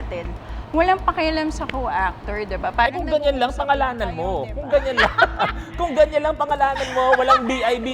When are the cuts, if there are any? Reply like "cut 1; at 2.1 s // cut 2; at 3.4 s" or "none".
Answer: none